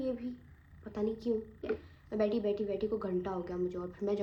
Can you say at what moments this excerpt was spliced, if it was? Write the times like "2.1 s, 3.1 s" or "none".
none